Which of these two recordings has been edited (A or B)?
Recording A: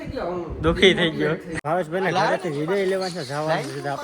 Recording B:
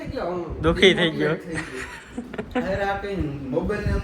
A